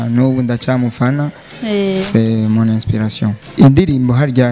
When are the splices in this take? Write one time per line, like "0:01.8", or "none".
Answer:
0:03.4